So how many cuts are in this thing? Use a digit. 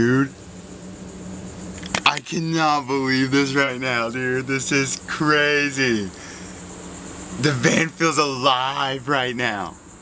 0